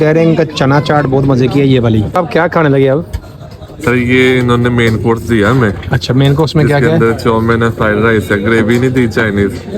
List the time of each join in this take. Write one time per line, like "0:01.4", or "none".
0:02.2

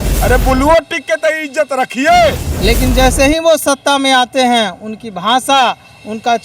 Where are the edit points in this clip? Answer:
0:02.4

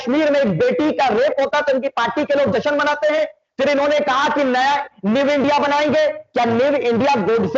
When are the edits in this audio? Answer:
none

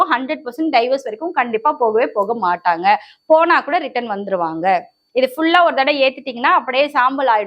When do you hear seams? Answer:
0:05.0

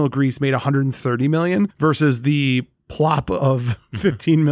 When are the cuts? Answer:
none

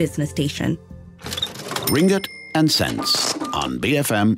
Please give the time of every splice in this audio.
0:01.0

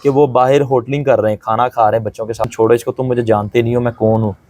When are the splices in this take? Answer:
0:02.4

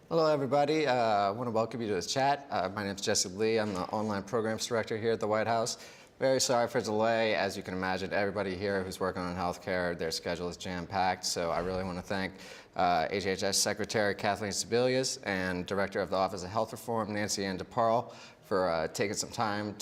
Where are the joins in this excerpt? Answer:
none

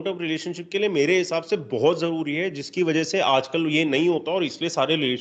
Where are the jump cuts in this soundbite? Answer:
none

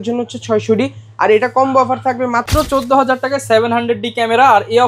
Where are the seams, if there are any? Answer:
0:02.5

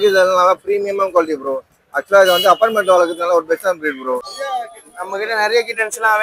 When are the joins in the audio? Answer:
0:04.2

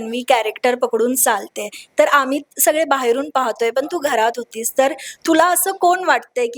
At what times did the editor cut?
none

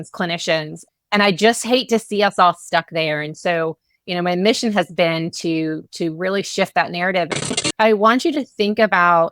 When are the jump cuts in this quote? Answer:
0:07.6

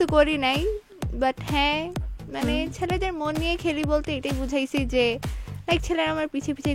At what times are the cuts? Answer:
none

